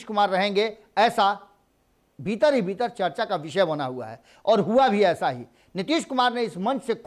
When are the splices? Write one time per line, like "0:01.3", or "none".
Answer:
none